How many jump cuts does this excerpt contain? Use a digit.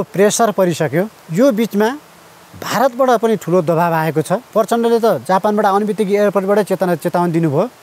2